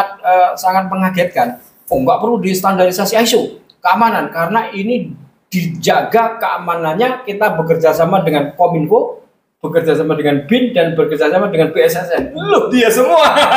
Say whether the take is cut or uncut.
uncut